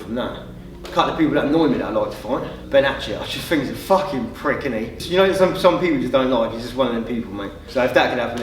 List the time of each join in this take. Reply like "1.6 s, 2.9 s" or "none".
0.8 s, 2.6 s, 5.0 s, 7.6 s